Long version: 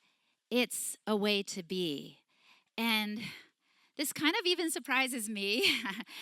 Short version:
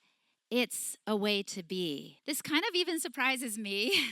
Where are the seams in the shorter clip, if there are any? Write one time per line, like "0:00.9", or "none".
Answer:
0:02.1